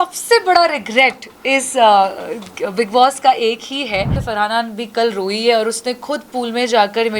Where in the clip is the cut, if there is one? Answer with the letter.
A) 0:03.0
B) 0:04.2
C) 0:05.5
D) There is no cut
B